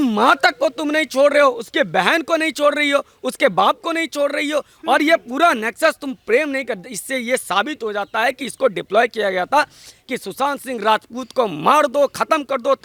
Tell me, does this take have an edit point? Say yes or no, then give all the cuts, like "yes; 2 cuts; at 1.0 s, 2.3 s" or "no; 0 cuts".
no; 0 cuts